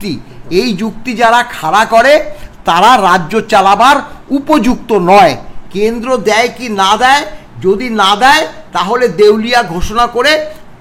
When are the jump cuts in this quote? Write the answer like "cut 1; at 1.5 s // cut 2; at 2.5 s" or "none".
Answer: none